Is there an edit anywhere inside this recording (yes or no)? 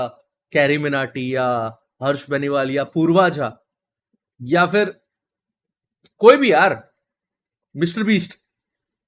no